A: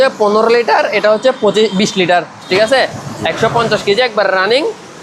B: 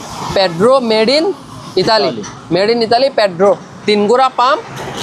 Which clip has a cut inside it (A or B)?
A